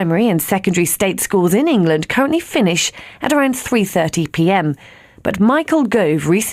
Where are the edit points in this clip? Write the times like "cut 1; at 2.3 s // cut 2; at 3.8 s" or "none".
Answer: cut 1; at 4.4 s